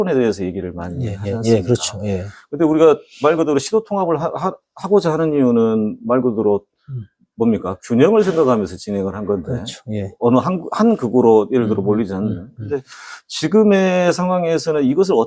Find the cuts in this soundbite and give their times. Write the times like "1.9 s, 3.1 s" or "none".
none